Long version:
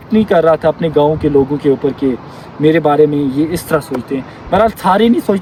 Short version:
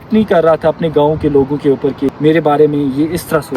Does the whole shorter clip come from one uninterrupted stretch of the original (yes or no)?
no